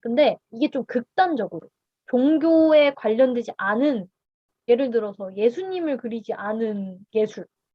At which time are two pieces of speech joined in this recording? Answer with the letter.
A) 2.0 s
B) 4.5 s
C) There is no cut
B